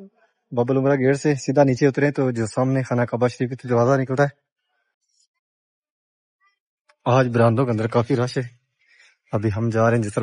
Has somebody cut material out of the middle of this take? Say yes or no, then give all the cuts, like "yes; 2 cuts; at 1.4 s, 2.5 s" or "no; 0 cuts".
no; 0 cuts